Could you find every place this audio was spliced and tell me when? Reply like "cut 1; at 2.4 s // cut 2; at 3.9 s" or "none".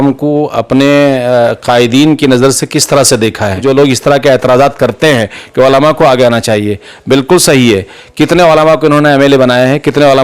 cut 1; at 3.6 s